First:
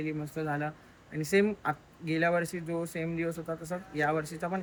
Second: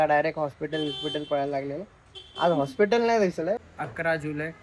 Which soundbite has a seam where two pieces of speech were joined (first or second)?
second